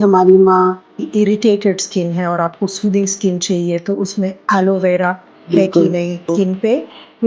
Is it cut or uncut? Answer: cut